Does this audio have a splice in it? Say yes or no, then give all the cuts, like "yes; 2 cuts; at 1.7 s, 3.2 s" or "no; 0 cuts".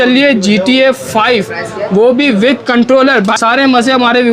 yes; 1 cut; at 3.3 s